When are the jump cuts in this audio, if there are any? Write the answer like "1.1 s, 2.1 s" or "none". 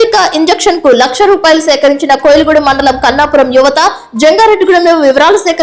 none